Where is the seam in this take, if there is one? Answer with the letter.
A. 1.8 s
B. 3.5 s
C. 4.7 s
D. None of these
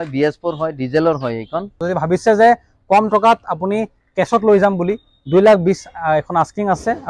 A